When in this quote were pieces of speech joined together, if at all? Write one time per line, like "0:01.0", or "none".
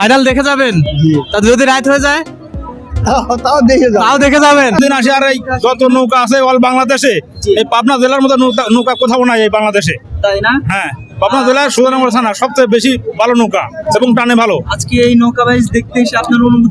0:04.8